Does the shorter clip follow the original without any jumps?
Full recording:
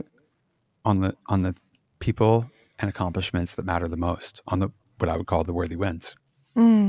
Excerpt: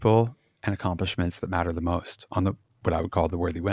yes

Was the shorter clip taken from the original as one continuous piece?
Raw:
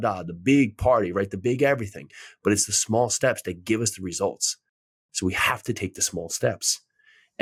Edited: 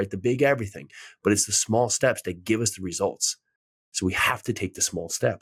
yes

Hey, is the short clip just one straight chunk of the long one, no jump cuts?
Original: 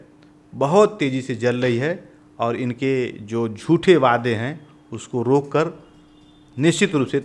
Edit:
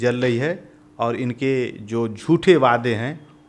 yes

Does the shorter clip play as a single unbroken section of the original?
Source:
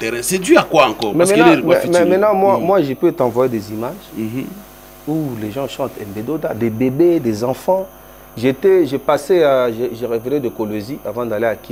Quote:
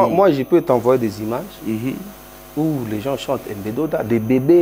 yes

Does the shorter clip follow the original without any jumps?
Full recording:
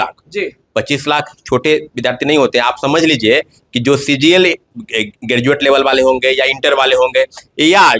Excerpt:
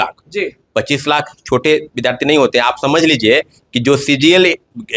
yes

